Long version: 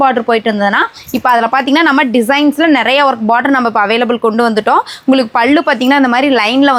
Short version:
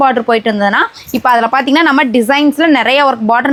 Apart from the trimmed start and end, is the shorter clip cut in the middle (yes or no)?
no